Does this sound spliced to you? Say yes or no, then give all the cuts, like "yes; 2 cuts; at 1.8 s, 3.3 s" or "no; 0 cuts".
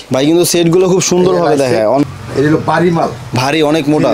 yes; 1 cut; at 2.0 s